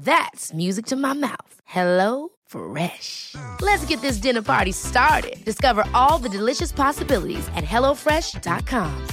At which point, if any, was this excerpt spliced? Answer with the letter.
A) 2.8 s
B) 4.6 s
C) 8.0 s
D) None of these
D